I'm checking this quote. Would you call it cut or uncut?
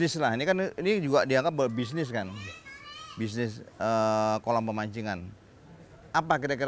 uncut